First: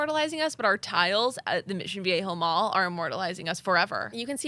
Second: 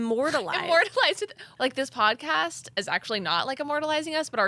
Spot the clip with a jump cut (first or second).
second